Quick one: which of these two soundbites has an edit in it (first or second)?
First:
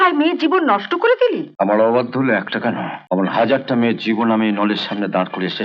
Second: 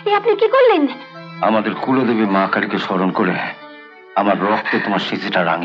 first